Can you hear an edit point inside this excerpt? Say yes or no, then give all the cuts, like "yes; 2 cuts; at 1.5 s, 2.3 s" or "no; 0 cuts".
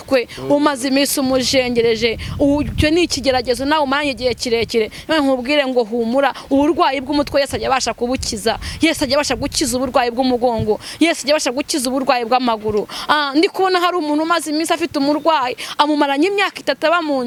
no; 0 cuts